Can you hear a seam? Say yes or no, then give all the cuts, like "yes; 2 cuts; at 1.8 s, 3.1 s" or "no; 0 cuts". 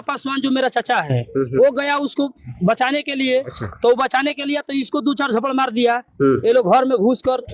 yes; 1 cut; at 6.4 s